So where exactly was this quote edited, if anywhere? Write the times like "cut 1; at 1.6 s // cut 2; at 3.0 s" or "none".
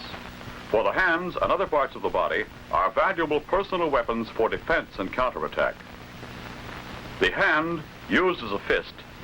cut 1; at 7.2 s